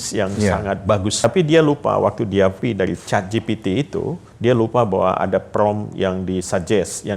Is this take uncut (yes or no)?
no